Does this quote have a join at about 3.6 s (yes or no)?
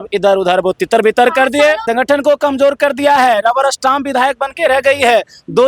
no